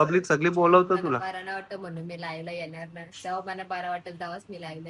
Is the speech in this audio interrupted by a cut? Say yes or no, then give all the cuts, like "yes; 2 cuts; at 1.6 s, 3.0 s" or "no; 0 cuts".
no; 0 cuts